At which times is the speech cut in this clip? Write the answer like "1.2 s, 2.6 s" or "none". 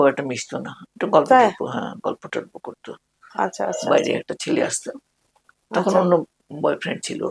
none